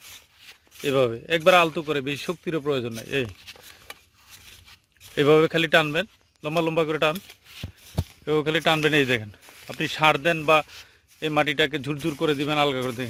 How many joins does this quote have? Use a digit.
0